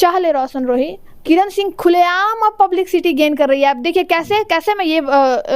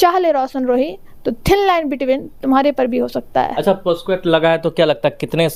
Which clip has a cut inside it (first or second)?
first